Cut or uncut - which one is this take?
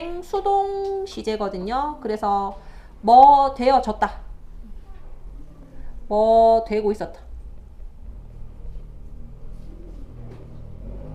uncut